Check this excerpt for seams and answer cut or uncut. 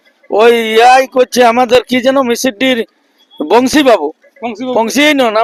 uncut